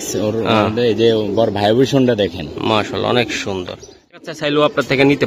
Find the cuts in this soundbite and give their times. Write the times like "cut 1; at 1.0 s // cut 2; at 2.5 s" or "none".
cut 1; at 4.1 s